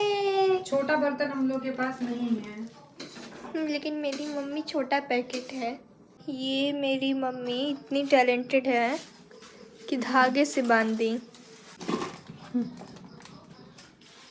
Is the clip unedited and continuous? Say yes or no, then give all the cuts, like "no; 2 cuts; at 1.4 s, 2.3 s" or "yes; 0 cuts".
yes; 0 cuts